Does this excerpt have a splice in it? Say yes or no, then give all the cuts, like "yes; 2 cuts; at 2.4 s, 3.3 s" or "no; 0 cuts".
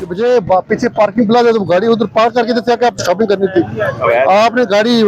no; 0 cuts